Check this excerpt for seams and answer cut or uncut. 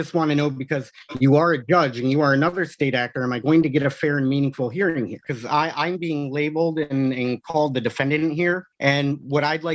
cut